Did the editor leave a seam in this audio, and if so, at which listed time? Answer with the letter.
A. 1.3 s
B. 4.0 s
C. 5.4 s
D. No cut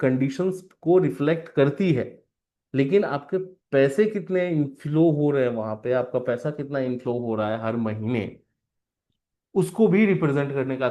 D